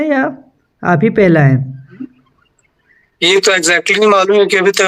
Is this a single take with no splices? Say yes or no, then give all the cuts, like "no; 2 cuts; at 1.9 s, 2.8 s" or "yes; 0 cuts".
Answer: yes; 0 cuts